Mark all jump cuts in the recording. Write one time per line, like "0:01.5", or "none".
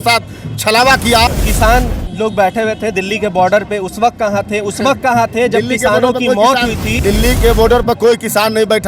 0:01.4
0:06.9